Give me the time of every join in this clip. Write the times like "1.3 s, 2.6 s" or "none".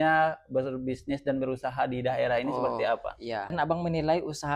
3.5 s